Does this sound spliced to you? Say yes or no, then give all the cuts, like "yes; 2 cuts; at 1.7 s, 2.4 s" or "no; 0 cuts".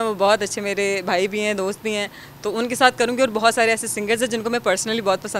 no; 0 cuts